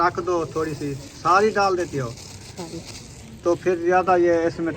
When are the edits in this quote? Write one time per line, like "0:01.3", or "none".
0:02.7